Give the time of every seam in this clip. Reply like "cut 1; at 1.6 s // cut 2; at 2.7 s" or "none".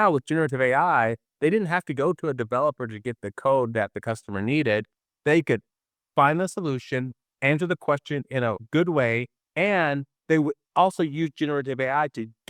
cut 1; at 8.6 s